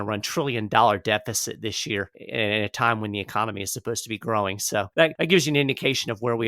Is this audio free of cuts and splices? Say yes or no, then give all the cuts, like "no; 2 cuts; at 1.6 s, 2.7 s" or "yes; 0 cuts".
no; 2 cuts; at 2.2 s, 5.1 s